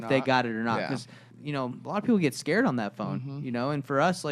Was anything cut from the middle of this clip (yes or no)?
yes